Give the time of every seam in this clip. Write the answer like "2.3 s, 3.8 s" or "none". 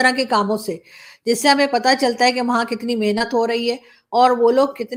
none